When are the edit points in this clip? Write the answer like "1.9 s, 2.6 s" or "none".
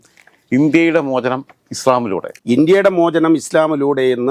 2.2 s